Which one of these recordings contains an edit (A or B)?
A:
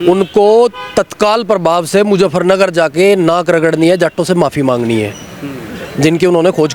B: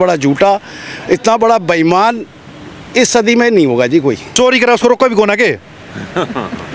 B